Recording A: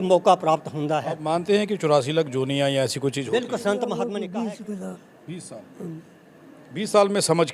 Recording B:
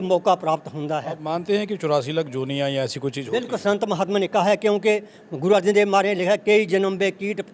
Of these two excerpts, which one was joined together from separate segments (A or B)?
A